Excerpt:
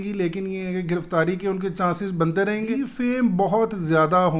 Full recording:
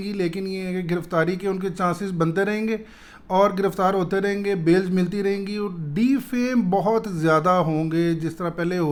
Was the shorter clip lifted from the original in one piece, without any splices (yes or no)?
no